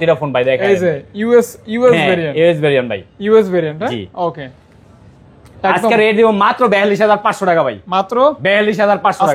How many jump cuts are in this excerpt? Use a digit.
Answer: 0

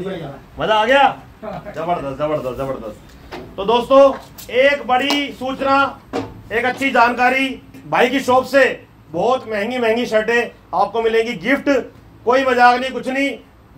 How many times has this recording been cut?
0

